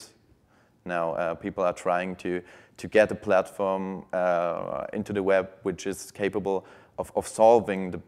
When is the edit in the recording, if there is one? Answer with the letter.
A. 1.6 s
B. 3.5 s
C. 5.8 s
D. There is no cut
D